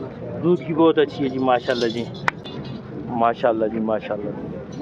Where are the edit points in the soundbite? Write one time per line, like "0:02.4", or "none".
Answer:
0:02.4